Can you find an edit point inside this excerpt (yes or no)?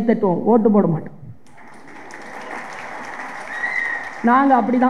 no